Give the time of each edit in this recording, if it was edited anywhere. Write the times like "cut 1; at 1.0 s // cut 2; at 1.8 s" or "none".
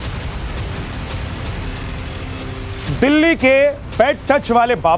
none